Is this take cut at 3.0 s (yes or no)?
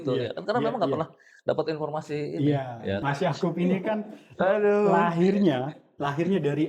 yes